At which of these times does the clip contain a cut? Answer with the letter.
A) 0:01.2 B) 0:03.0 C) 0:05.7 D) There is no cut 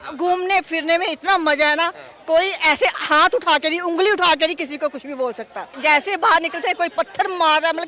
C